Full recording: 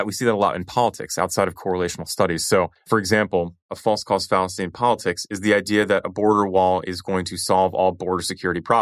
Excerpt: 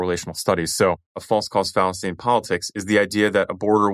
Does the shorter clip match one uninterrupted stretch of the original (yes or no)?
no